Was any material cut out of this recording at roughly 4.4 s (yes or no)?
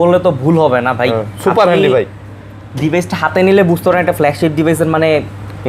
no